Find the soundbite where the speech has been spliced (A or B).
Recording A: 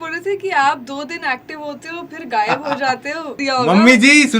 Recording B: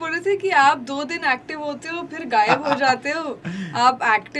A